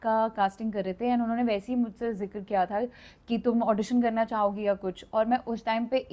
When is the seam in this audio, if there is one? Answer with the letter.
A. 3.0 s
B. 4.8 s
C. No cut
C